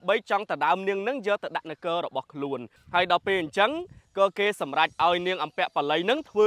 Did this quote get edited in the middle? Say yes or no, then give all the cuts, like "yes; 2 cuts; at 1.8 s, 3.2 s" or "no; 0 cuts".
yes; 1 cut; at 2.8 s